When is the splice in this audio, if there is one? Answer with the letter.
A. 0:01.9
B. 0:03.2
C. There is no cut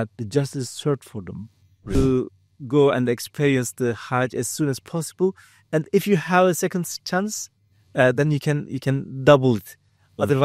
A